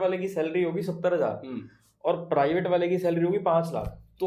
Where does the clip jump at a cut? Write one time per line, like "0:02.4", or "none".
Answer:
none